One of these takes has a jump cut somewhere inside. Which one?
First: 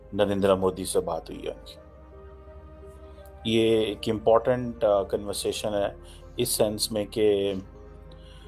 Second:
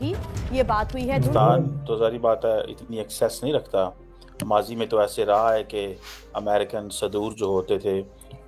second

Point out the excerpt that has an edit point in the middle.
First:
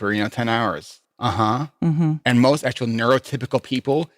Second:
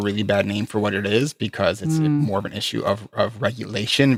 first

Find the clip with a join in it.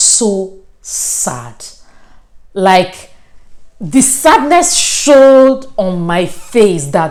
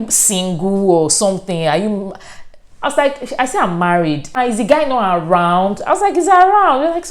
second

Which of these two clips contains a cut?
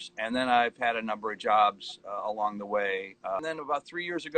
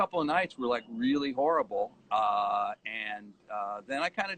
first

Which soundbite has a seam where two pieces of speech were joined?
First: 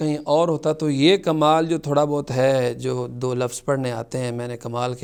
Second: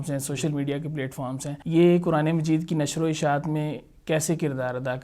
second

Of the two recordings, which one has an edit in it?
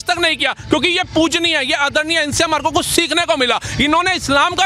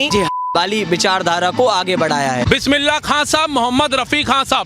second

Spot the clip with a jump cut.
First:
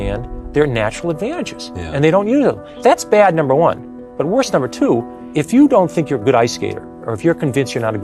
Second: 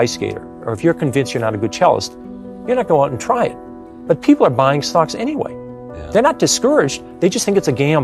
first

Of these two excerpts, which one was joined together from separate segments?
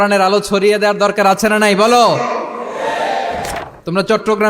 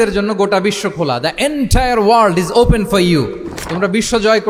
first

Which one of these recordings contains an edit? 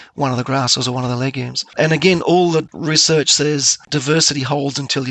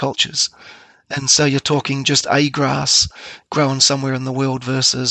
first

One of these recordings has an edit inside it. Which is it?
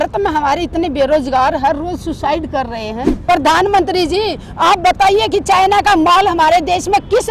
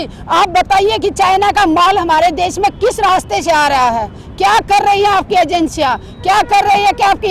first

